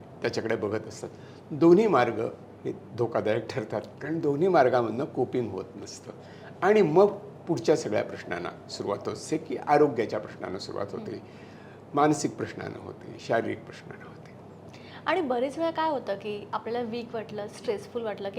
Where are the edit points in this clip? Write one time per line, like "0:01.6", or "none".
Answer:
none